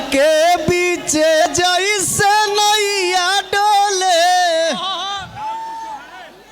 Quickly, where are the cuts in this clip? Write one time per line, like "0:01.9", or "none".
0:01.4

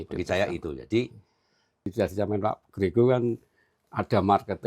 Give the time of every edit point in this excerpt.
0:01.9

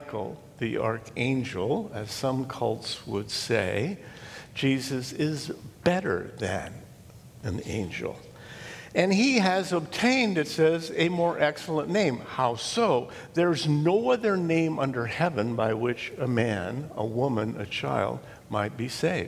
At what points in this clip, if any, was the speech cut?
none

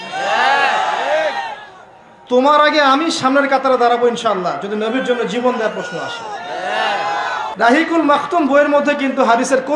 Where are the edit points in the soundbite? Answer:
0:07.4

